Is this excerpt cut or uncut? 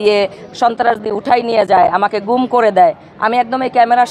uncut